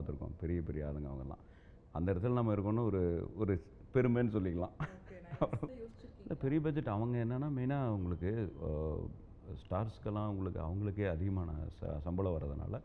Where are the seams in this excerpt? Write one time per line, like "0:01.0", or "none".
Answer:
0:06.0